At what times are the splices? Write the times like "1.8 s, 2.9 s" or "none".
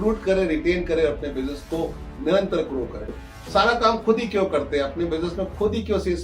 3.1 s